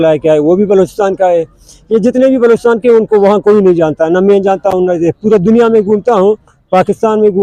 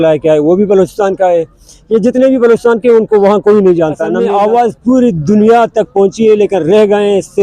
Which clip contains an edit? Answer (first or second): second